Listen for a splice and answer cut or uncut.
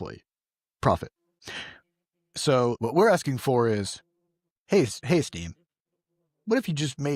cut